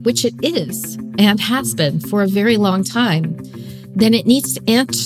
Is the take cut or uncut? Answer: uncut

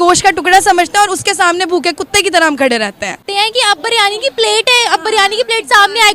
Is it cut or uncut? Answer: cut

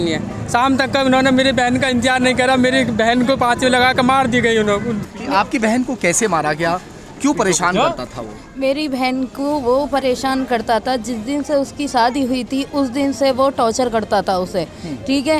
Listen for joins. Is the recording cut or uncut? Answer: cut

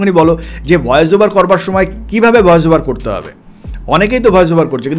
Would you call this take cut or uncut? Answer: uncut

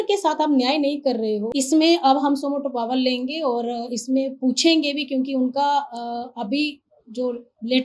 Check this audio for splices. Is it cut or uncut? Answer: cut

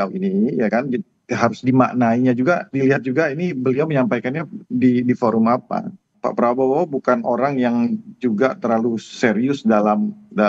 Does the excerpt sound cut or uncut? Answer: uncut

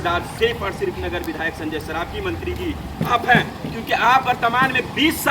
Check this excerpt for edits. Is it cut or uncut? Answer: uncut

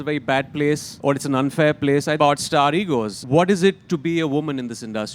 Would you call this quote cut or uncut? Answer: cut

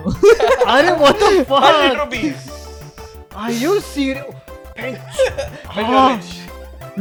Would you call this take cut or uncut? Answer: uncut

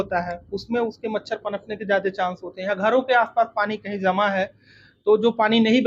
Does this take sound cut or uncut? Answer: uncut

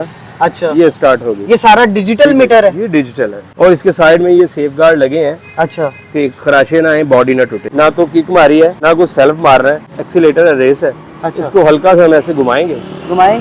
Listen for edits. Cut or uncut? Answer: cut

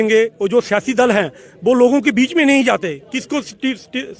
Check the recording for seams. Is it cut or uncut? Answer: uncut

